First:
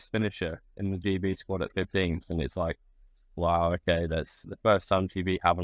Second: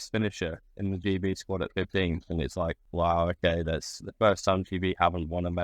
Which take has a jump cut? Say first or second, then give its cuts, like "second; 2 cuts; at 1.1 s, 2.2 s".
second; 1 cut; at 2.8 s